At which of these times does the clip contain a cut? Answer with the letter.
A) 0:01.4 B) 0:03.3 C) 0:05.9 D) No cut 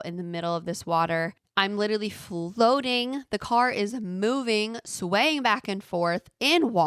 A